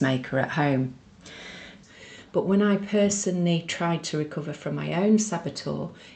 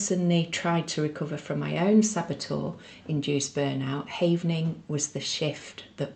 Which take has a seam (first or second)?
first